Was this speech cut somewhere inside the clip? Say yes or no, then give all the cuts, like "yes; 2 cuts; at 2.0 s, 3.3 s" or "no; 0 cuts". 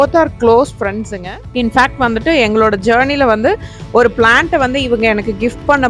yes; 1 cut; at 1.1 s